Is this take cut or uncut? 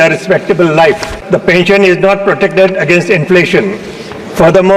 cut